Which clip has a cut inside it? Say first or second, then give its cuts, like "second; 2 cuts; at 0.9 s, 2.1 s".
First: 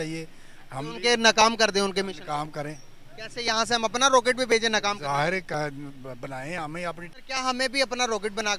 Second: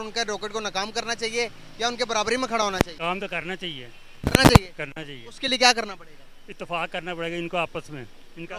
first; 1 cut; at 7.0 s